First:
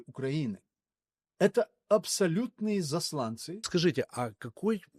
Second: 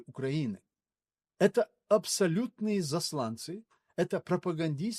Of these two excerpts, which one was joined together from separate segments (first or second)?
first